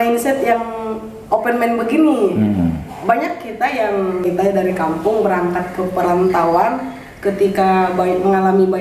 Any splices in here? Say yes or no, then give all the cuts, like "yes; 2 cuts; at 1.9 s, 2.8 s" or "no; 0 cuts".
yes; 1 cut; at 4.2 s